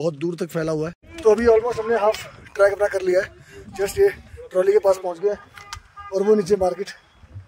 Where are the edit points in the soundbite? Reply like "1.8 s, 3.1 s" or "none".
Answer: 1.0 s